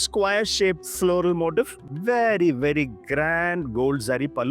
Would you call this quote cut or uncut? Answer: cut